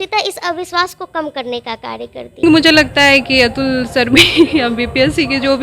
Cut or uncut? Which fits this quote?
cut